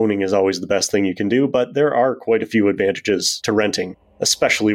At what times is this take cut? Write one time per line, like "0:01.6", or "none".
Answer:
0:03.7